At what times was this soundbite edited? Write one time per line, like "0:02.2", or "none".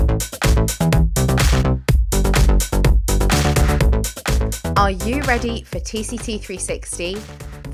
none